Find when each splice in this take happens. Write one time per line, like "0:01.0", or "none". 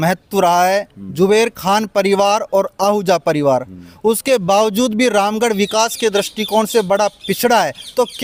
none